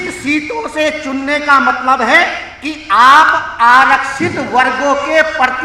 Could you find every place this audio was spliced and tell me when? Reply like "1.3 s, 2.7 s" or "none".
none